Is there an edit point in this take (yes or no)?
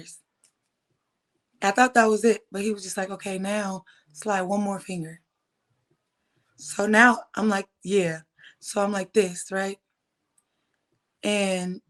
no